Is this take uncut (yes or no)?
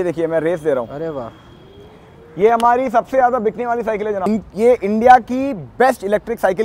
no